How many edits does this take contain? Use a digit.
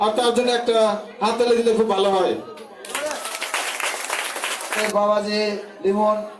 1